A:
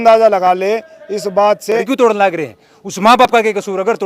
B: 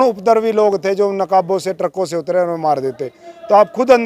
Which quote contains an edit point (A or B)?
A